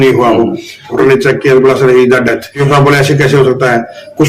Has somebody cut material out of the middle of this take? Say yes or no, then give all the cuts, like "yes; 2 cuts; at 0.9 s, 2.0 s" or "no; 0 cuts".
yes; 2 cuts; at 0.9 s, 2.6 s